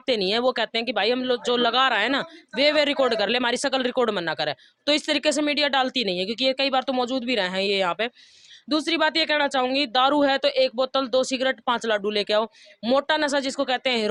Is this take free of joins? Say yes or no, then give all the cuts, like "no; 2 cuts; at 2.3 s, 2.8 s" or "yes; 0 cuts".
yes; 0 cuts